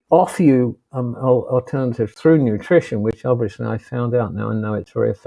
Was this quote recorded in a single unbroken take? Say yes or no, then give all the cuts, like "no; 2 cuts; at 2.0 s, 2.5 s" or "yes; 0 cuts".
yes; 0 cuts